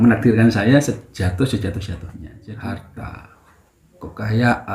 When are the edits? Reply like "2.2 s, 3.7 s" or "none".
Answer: 2.9 s